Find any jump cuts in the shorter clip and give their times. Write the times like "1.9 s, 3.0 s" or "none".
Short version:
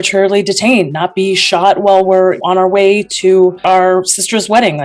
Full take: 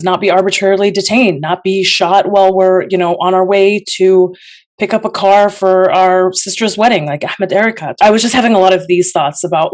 2.4 s, 3.6 s